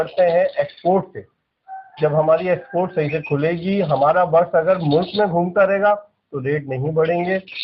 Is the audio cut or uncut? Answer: uncut